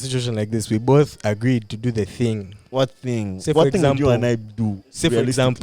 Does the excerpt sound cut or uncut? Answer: cut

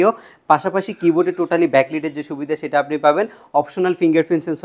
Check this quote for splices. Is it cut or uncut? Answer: uncut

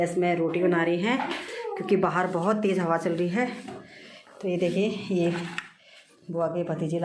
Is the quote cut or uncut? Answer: uncut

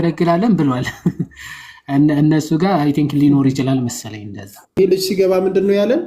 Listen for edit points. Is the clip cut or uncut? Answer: cut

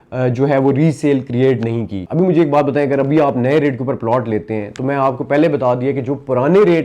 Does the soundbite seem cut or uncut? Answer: cut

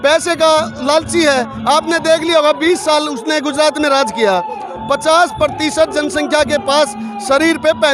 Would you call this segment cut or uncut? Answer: uncut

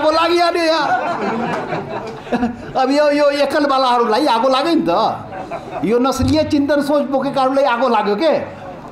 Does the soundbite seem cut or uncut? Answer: uncut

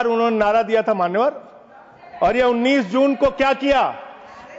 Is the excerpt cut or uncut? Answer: uncut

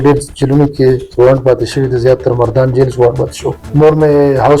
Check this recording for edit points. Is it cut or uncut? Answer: cut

